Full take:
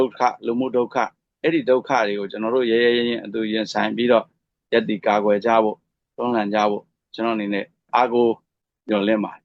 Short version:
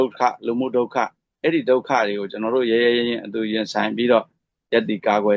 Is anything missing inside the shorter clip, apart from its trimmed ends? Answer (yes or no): no